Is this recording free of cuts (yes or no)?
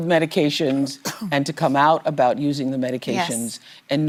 yes